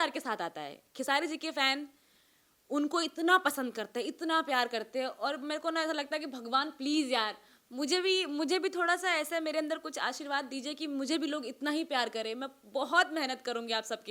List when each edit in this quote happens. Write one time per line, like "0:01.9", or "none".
none